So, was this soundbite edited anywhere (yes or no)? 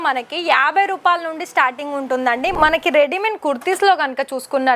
yes